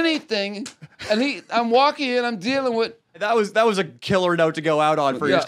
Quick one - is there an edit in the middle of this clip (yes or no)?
no